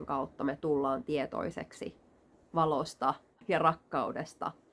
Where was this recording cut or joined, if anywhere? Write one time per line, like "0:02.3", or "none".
0:03.4